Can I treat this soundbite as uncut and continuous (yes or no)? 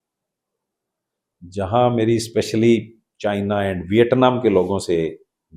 yes